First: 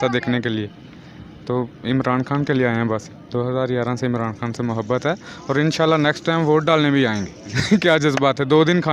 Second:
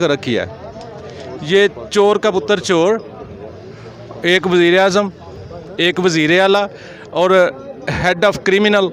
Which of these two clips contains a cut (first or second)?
first